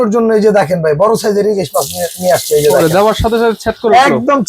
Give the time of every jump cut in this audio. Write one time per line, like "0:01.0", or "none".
none